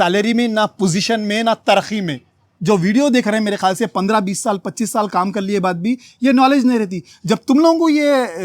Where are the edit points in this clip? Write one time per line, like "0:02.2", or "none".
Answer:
0:02.5